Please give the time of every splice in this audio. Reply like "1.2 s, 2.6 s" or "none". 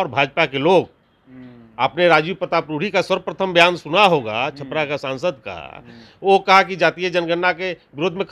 none